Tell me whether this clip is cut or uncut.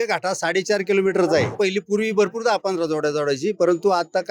cut